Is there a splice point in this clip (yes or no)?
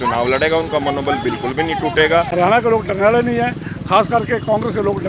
yes